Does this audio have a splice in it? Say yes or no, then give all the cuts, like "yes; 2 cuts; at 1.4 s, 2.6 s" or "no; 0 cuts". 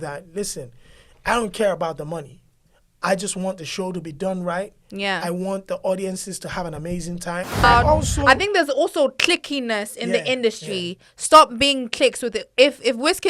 yes; 1 cut; at 7.6 s